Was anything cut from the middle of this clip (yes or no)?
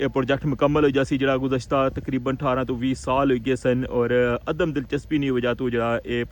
no